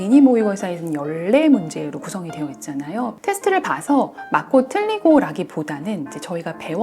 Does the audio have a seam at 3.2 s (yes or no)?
yes